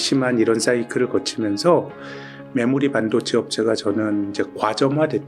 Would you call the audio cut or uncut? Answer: uncut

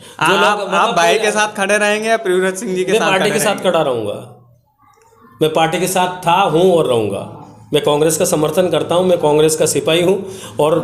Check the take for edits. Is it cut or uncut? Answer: uncut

